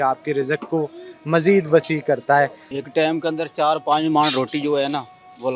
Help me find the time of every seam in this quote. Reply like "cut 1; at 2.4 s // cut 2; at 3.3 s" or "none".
cut 1; at 2.6 s